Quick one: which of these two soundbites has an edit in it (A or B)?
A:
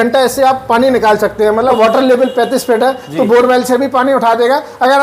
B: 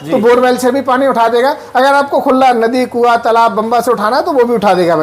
A